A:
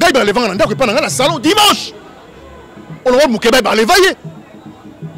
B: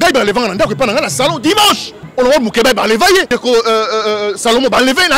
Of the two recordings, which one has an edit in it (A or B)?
B